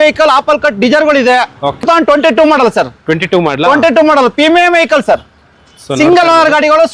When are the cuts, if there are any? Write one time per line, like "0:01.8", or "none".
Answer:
0:01.8